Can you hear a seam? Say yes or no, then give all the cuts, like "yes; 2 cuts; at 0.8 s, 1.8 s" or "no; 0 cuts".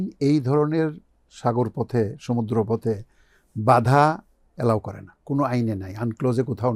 no; 0 cuts